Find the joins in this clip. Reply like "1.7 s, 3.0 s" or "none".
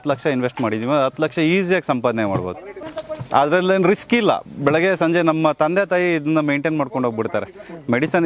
none